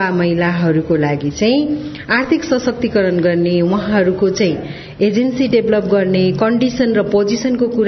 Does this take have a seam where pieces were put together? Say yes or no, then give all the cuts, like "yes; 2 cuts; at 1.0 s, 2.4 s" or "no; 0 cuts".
no; 0 cuts